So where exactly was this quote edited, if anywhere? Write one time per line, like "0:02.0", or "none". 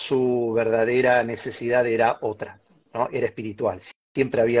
none